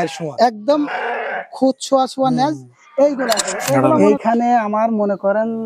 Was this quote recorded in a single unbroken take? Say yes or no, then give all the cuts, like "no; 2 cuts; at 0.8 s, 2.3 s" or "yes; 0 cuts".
no; 1 cut; at 3.9 s